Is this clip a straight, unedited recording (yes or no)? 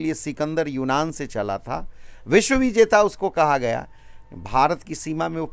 yes